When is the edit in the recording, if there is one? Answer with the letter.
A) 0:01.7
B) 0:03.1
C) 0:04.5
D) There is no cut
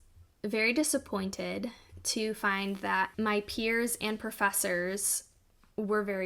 B